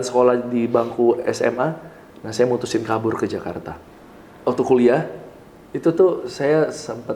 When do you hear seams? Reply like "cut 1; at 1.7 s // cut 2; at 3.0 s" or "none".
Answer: cut 1; at 3.7 s